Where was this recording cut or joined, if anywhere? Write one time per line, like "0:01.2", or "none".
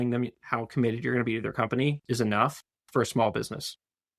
0:02.0